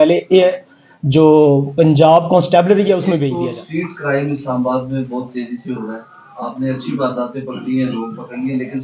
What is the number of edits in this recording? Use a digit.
1